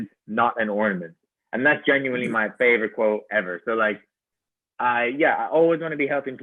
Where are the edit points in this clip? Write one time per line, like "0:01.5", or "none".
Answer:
none